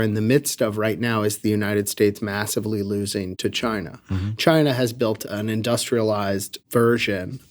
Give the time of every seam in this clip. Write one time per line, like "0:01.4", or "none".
0:03.3
0:05.2
0:06.5

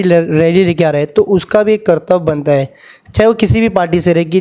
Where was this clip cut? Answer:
none

